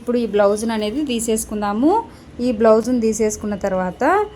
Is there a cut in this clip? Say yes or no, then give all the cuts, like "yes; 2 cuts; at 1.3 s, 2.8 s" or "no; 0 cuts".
no; 0 cuts